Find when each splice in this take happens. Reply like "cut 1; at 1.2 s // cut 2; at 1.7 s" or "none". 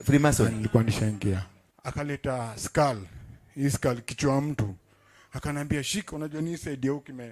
cut 1; at 1.6 s